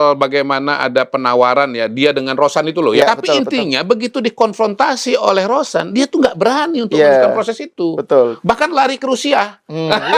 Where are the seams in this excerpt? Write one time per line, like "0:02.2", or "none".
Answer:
0:03.0